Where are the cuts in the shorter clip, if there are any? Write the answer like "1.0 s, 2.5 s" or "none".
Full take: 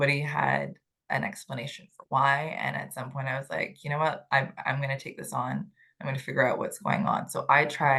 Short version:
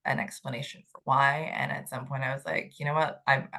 none